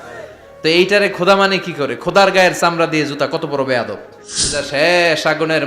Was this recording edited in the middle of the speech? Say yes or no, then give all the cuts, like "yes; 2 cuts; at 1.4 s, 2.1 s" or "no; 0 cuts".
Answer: yes; 1 cut; at 4.6 s